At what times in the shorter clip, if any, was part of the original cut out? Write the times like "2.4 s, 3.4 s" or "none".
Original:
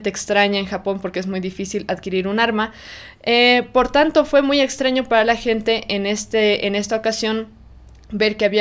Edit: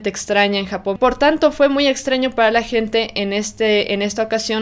1.0 s